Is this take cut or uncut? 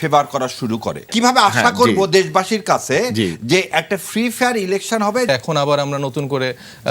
cut